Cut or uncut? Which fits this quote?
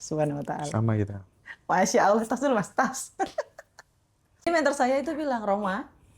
cut